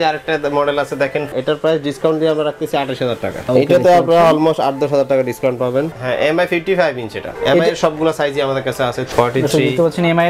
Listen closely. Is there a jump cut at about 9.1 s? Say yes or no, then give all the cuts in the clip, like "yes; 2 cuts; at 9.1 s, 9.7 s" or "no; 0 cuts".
yes; 4 cuts; at 1.3 s, 3.5 s, 5.9 s, 9.1 s